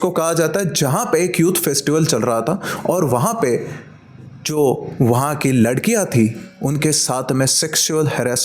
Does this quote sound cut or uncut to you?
uncut